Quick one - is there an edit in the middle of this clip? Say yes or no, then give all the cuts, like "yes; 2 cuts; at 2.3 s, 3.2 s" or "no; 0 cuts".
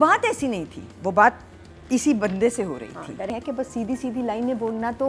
yes; 1 cut; at 3.3 s